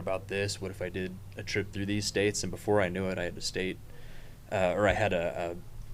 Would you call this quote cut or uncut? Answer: uncut